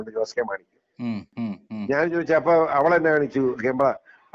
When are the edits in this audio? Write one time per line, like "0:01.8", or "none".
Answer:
0:01.3